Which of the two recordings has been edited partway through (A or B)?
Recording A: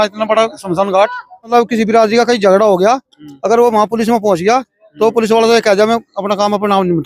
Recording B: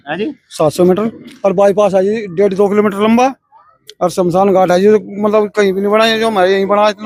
A